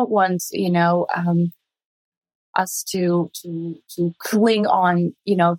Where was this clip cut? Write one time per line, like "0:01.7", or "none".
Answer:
none